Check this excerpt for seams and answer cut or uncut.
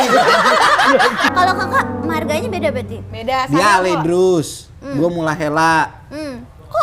cut